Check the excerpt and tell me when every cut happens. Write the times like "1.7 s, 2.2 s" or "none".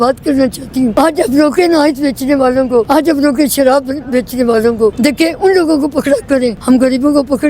0.9 s, 2.9 s, 5.0 s, 6.6 s